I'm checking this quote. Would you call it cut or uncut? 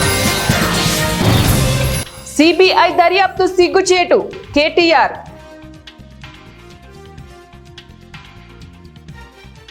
uncut